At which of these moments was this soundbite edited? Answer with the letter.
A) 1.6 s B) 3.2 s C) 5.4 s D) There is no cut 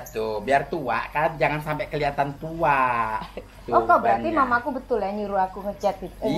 B